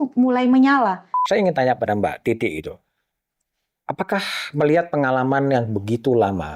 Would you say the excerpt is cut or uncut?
cut